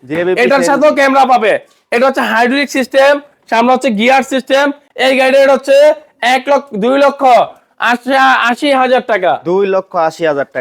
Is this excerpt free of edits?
yes; 0 cuts

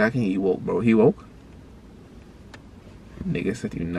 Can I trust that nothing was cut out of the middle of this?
yes; 0 cuts

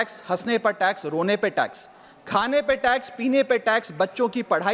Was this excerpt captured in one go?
yes; 0 cuts

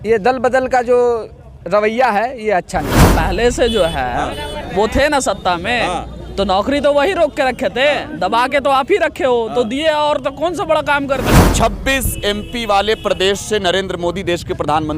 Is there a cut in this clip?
yes; 2 cuts; at 3.0 s, 11.3 s

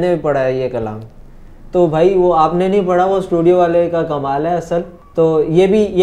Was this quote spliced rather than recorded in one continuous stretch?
yes; 1 cut; at 5.0 s

